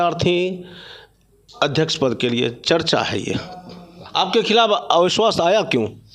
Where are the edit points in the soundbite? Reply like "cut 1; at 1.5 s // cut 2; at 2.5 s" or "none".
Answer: cut 1; at 3.9 s